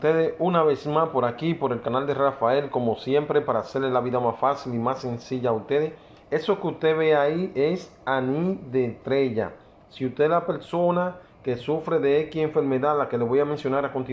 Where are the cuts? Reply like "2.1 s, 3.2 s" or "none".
none